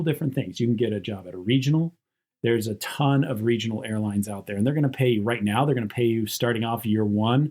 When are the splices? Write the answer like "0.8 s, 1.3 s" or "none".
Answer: 2.2 s